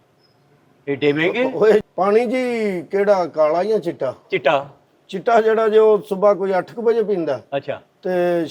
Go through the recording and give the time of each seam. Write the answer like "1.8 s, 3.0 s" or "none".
1.9 s